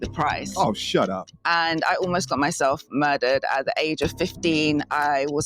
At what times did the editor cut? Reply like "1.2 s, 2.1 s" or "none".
1.3 s